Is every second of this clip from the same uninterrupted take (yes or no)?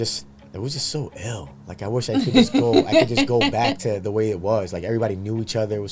yes